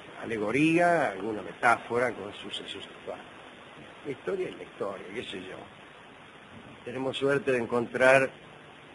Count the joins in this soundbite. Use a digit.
0